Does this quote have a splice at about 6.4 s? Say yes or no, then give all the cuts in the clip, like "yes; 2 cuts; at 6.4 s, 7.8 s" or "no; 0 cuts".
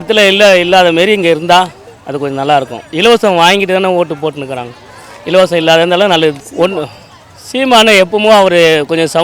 yes; 1 cut; at 6.4 s